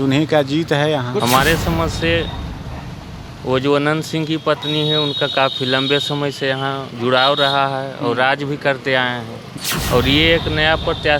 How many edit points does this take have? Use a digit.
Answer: 2